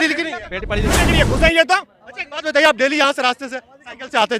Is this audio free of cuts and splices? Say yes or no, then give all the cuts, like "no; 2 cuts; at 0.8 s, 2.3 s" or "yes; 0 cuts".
no; 1 cut; at 1.1 s